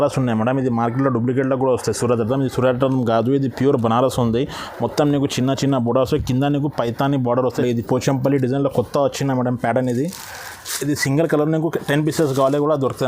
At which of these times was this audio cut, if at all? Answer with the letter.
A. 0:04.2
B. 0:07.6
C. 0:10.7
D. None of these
B